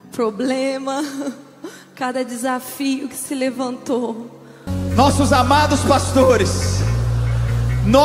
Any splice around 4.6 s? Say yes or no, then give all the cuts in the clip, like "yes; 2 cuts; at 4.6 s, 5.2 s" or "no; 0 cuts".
yes; 1 cut; at 4.6 s